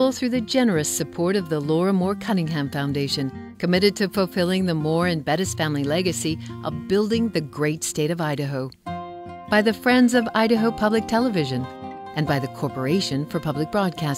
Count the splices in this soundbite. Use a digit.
0